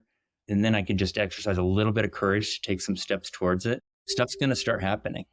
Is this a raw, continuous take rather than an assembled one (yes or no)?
yes